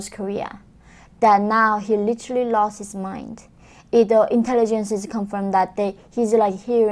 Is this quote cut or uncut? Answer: uncut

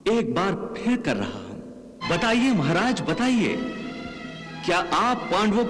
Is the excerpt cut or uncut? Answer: cut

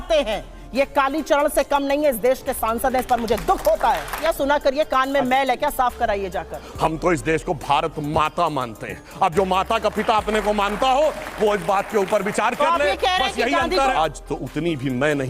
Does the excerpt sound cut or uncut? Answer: cut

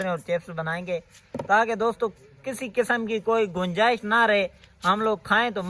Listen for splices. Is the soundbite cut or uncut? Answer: uncut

